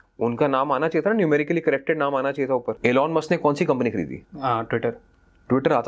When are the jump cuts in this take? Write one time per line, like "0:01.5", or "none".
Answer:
0:02.7
0:04.2